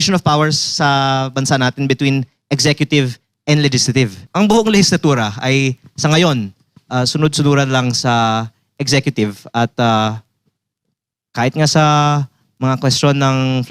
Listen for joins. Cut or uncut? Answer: cut